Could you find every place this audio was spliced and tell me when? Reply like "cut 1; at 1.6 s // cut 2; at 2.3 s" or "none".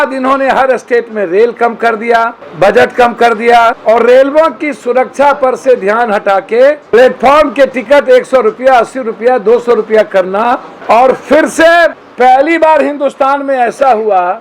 cut 1; at 2.4 s // cut 2; at 3.8 s // cut 3; at 6.8 s // cut 4; at 10.7 s // cut 5; at 12.0 s